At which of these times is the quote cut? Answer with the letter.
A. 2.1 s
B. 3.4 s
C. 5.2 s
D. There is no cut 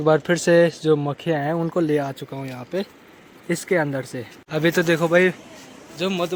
D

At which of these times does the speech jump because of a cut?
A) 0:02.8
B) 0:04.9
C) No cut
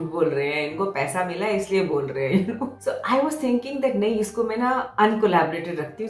A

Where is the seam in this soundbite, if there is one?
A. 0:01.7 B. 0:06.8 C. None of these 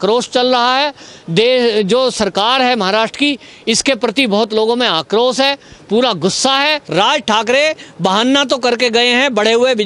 B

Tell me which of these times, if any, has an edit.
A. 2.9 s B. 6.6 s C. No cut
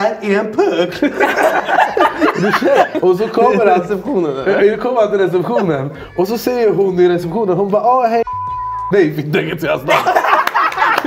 A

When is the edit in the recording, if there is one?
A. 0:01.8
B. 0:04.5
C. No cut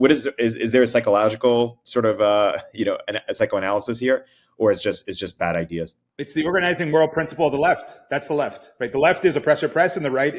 C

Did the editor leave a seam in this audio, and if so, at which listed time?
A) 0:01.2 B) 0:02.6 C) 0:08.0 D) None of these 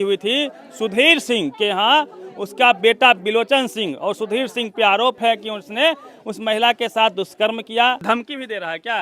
C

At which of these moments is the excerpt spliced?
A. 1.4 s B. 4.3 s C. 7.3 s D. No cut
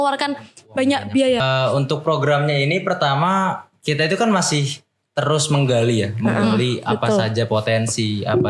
A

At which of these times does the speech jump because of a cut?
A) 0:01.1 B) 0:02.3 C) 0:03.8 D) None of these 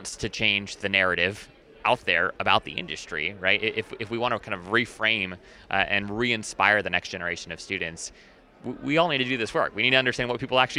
B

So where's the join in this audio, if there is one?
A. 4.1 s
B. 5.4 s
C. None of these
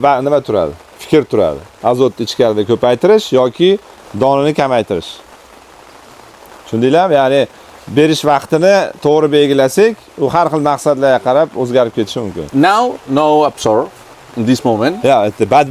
C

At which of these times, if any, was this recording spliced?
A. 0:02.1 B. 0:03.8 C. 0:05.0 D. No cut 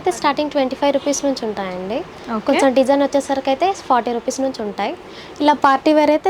D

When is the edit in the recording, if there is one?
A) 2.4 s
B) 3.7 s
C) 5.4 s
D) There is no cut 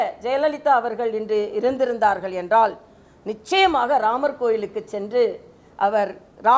D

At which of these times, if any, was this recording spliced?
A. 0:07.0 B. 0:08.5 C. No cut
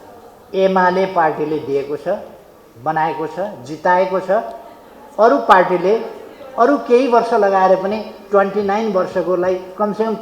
C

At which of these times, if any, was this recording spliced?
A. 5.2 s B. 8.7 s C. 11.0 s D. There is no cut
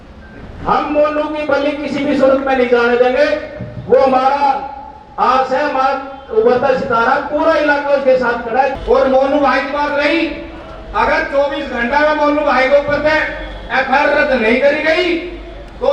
B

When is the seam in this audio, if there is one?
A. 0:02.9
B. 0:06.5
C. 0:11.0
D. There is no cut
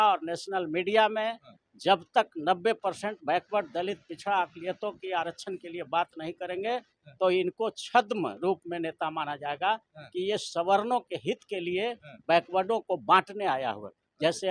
D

